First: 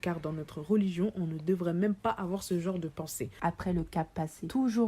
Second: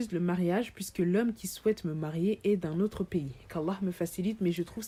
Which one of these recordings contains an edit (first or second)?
first